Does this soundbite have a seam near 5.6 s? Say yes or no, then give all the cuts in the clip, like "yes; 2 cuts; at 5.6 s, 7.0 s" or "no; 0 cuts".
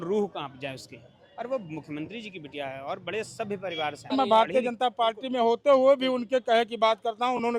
no; 1 cut; at 4.1 s